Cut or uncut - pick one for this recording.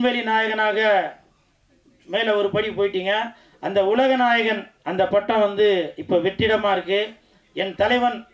uncut